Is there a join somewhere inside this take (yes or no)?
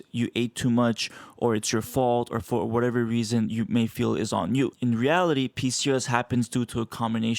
yes